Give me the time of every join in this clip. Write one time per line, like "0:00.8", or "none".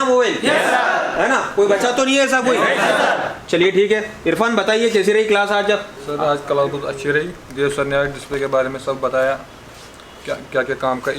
none